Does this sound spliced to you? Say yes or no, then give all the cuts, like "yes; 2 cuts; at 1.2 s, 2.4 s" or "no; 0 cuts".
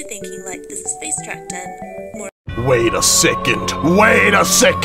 no; 0 cuts